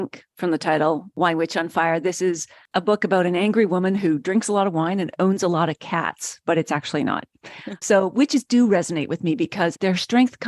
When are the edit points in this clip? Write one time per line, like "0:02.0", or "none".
0:07.8
0:09.7